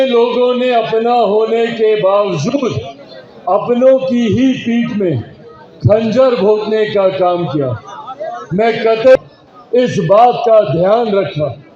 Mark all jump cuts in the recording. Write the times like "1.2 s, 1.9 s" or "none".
9.2 s